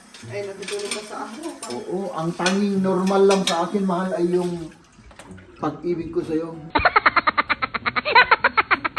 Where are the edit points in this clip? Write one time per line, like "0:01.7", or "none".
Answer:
0:06.6